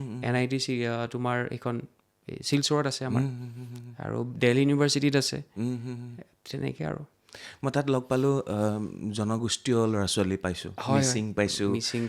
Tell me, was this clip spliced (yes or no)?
no